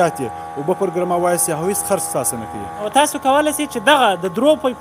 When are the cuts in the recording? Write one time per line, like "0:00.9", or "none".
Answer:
0:02.9